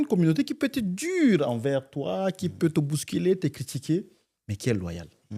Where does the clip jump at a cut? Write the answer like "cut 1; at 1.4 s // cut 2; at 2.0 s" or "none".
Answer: none